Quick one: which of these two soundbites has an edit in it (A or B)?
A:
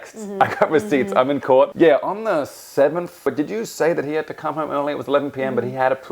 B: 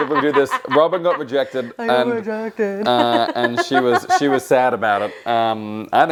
A